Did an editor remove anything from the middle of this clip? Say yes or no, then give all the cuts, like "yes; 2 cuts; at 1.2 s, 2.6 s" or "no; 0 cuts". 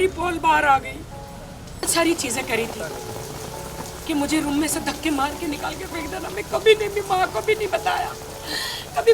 yes; 1 cut; at 1.9 s